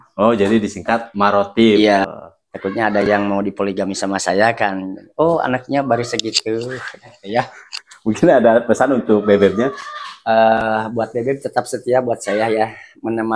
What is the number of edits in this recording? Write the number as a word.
one